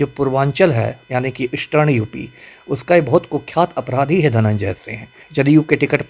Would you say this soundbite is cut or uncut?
cut